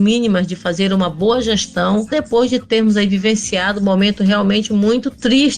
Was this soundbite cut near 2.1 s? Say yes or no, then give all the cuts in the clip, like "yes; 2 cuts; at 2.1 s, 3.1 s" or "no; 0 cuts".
yes; 1 cut; at 2.1 s